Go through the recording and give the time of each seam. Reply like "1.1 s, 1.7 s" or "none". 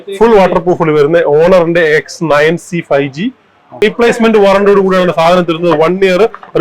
3.8 s